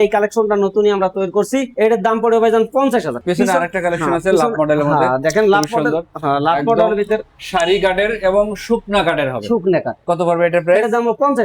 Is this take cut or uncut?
uncut